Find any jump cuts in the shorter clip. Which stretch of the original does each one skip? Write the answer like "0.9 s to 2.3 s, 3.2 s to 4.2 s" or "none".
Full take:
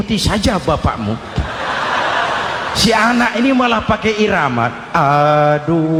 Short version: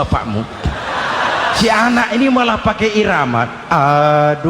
2.3 s to 2.8 s